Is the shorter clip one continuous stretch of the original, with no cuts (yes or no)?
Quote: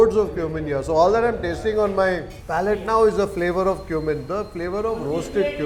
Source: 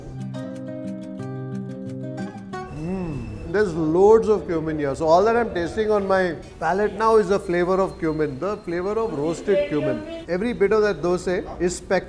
yes